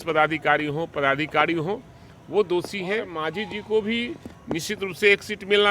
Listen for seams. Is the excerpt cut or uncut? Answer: cut